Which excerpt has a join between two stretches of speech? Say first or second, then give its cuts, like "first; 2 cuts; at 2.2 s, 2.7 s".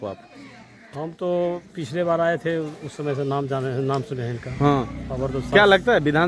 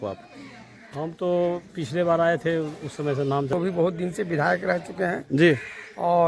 second; 1 cut; at 3.5 s